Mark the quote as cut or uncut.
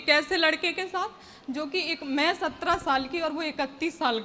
uncut